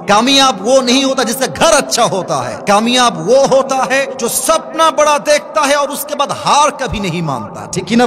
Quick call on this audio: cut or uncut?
cut